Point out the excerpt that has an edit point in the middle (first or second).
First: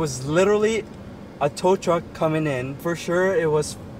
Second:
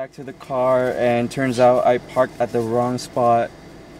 first